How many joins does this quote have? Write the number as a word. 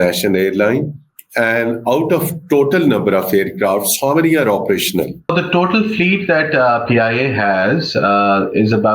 one